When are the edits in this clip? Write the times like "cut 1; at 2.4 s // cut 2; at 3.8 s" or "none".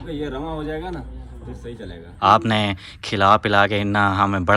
cut 1; at 2.0 s